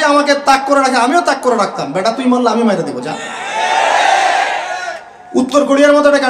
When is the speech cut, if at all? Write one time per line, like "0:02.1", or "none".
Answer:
none